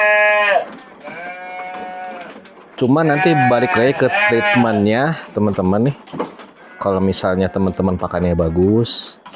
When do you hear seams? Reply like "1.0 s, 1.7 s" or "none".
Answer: none